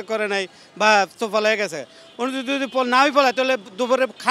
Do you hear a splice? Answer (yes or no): no